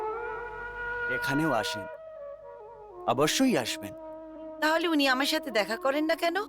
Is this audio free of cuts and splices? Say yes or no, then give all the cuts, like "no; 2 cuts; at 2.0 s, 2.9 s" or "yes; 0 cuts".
no; 1 cut; at 1.2 s